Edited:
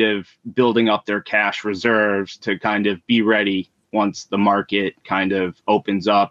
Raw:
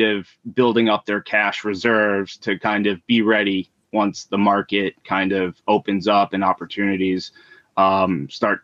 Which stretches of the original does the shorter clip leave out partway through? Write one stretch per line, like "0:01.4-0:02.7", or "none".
none